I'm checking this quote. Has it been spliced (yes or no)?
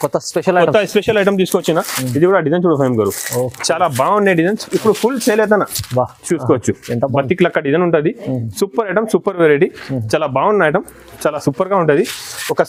no